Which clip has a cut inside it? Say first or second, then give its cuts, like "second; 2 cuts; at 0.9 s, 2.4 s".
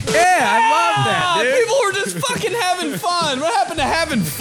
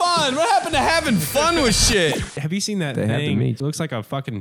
second; 2 cuts; at 2.4 s, 3.6 s